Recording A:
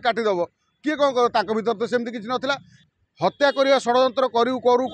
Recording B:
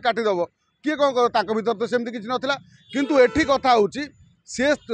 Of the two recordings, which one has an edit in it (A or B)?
A